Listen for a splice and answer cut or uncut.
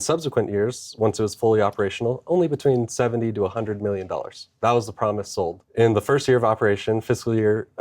cut